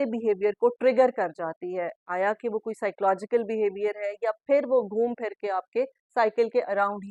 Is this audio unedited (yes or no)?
yes